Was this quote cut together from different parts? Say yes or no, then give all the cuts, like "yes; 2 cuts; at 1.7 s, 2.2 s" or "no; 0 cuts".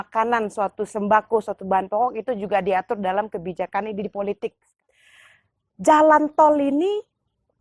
yes; 1 cut; at 4.7 s